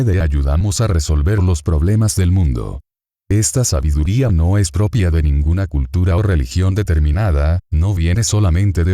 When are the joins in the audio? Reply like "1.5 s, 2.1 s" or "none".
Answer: 5.1 s